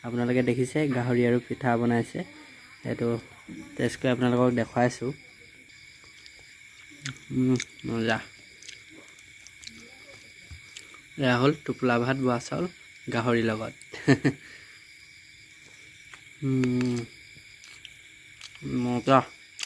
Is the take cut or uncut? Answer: uncut